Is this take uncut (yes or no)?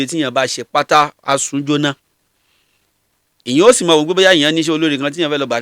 yes